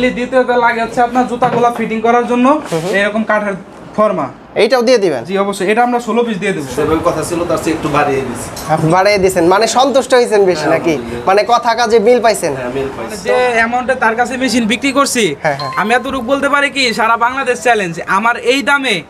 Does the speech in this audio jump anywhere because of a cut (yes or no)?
yes